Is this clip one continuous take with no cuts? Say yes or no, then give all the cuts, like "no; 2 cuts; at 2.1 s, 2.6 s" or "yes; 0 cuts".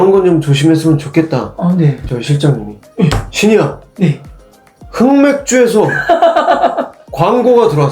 no; 1 cut; at 2.1 s